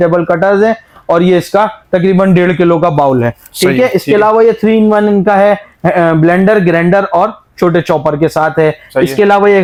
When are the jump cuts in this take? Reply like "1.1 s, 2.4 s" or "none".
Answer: none